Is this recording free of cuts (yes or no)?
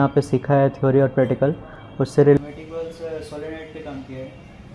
no